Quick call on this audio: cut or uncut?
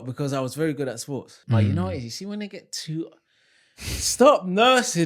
cut